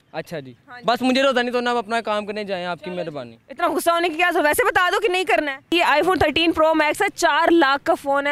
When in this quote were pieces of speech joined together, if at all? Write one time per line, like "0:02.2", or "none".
0:05.7